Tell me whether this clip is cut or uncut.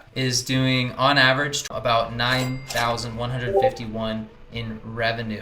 cut